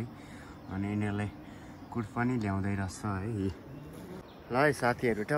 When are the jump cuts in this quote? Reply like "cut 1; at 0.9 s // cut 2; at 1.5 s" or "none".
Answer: cut 1; at 4.3 s